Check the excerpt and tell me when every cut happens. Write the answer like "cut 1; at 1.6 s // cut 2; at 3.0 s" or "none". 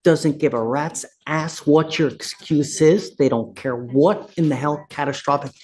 none